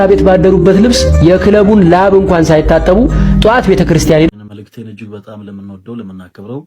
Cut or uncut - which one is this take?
cut